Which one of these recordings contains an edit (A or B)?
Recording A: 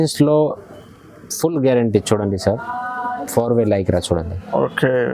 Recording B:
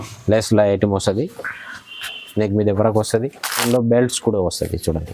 B